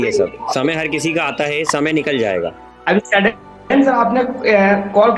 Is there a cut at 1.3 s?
no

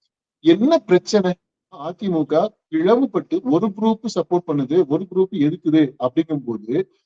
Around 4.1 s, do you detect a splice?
no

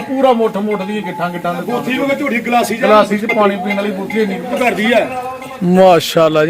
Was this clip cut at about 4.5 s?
yes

